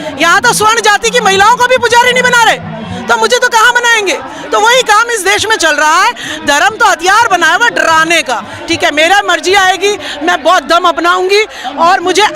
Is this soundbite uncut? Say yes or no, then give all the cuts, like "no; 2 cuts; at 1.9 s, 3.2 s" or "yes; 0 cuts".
no; 2 cuts; at 4.4 s, 8.5 s